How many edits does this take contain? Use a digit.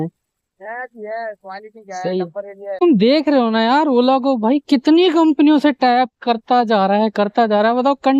1